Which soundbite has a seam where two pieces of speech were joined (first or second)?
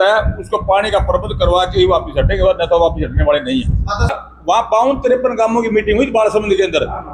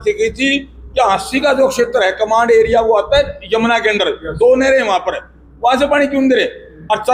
first